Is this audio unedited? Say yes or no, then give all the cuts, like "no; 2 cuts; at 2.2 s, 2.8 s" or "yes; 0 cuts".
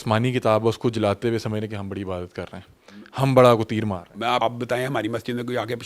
no; 1 cut; at 4.4 s